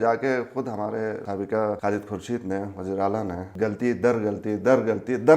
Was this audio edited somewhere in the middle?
yes; 2 cuts; at 1.3 s, 3.4 s

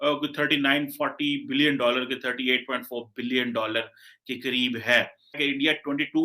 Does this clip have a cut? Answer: yes; 1 cut; at 5.3 s

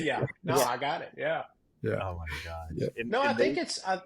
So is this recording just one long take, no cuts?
yes; 0 cuts

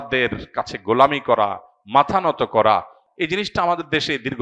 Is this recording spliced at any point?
yes; 1 cut; at 3.0 s

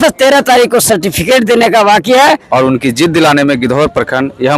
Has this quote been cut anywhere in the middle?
yes; 1 cut; at 2.4 s

